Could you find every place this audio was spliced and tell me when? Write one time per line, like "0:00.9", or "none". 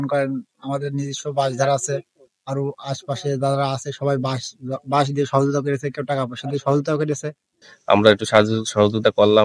0:07.7